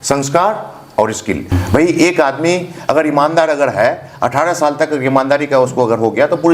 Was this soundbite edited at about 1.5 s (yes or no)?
yes